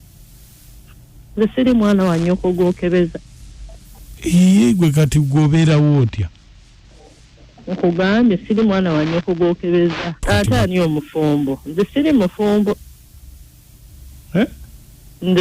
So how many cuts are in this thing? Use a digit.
1